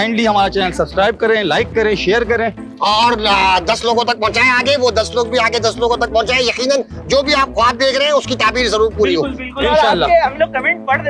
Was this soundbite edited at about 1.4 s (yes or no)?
no